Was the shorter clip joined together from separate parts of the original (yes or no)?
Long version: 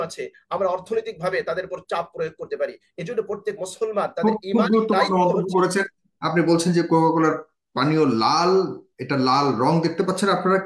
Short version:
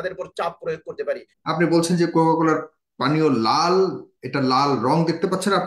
yes